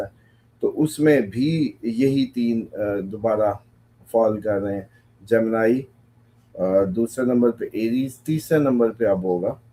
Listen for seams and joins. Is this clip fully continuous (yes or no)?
yes